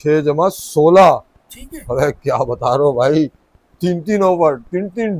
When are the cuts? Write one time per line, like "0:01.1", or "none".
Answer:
none